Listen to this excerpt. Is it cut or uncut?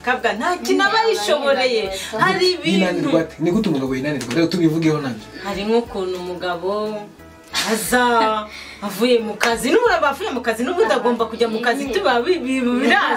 uncut